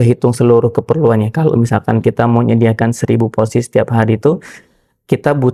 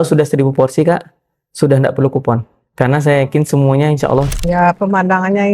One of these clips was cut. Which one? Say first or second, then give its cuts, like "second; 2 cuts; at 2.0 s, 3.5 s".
second; 1 cut; at 4.3 s